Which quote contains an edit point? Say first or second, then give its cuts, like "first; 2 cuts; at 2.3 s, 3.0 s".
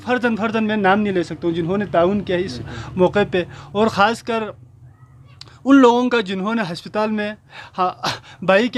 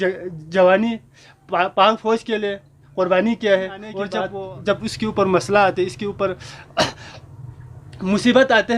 second; 1 cut; at 4.3 s